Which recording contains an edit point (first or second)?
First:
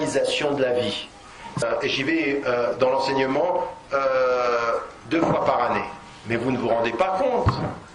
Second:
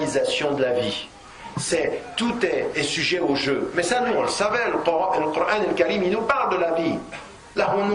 second